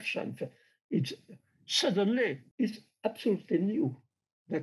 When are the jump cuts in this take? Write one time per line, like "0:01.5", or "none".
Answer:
0:02.4